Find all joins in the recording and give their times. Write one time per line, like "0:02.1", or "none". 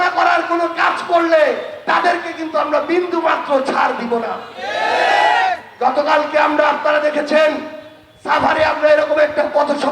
none